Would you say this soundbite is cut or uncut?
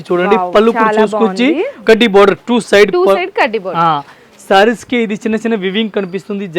cut